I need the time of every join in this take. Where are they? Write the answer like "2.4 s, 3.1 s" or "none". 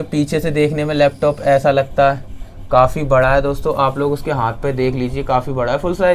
none